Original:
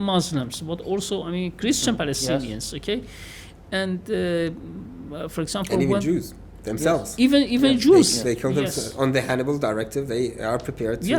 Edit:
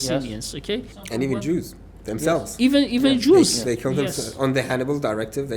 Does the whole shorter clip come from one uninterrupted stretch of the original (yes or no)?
no